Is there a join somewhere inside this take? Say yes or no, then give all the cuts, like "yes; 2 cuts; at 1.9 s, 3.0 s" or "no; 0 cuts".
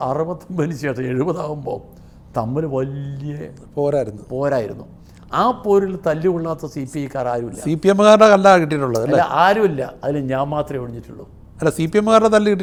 no; 0 cuts